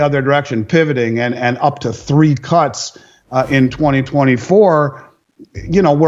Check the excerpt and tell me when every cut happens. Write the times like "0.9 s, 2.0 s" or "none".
none